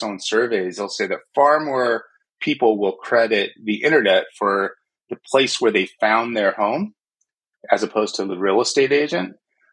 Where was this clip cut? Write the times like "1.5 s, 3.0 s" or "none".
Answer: none